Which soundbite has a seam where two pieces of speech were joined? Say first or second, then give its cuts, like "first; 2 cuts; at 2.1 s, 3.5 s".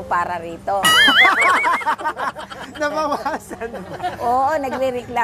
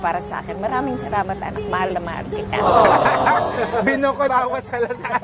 second; 1 cut; at 4.3 s